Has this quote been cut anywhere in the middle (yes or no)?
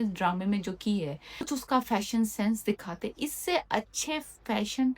yes